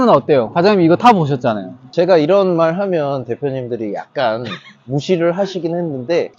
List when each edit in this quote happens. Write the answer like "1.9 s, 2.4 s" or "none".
none